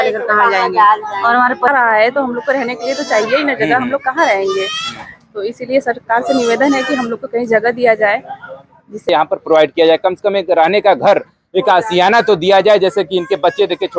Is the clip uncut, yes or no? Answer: no